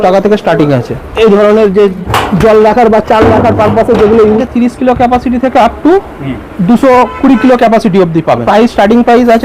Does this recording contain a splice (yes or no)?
yes